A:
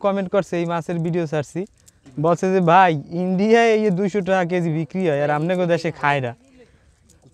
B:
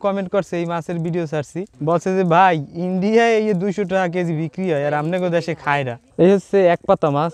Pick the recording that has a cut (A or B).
B